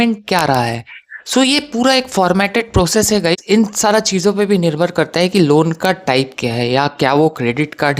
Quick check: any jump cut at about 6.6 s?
no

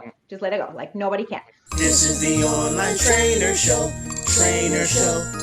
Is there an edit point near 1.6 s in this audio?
yes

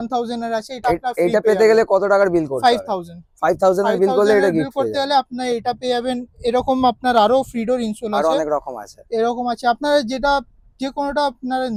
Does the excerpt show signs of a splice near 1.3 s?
no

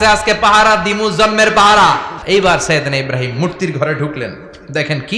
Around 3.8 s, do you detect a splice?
no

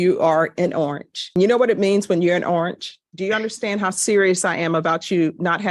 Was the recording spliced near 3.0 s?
yes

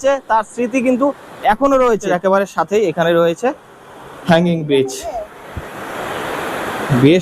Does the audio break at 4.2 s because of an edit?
no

